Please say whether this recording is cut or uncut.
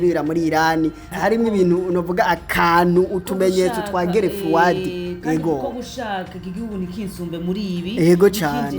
cut